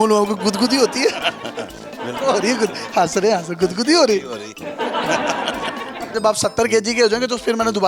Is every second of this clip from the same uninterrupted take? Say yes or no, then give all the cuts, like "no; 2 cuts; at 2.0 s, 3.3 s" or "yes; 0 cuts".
no; 1 cut; at 6.1 s